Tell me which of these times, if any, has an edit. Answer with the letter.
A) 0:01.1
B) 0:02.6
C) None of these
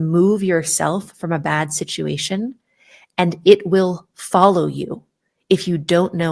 C